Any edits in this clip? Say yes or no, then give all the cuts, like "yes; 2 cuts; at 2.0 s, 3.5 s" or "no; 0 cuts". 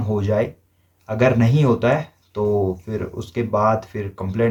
no; 0 cuts